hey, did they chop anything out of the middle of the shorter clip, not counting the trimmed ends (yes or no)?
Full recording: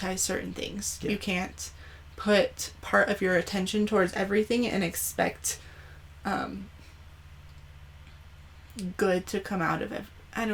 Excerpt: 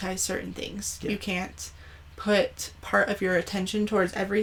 no